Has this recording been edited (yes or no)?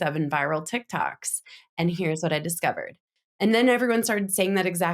no